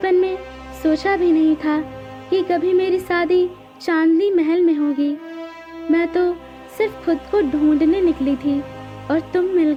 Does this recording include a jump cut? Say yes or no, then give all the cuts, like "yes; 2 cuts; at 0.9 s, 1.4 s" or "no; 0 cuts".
no; 0 cuts